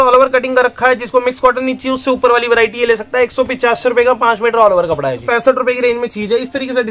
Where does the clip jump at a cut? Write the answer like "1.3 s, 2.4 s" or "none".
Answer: 5.2 s